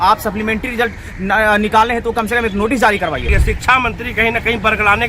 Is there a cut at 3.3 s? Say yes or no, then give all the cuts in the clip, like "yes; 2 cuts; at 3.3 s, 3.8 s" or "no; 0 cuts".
yes; 1 cut; at 3.3 s